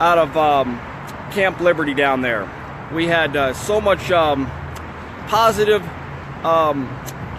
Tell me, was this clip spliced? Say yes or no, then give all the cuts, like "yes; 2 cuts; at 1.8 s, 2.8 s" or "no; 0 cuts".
yes; 1 cut; at 3.2 s